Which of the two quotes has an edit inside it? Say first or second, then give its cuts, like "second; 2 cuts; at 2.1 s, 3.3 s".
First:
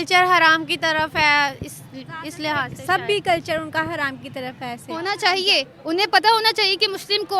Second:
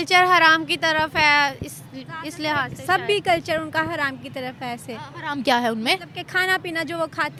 first; 1 cut; at 4.9 s